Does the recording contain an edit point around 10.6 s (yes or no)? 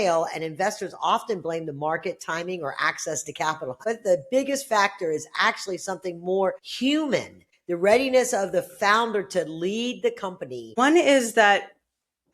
yes